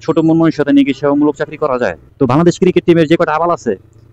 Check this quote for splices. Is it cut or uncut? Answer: cut